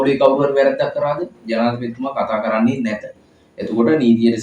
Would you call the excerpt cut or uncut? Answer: uncut